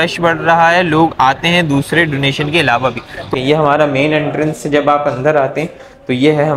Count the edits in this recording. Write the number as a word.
one